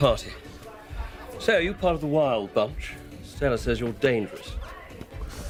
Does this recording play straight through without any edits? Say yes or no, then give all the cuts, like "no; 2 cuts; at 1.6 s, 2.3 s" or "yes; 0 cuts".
yes; 0 cuts